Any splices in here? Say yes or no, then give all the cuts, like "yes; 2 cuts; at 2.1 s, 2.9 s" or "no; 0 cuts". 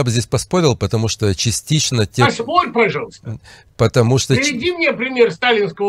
no; 0 cuts